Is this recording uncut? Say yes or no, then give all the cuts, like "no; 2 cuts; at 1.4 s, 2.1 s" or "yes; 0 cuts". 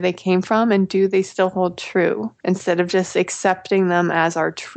yes; 0 cuts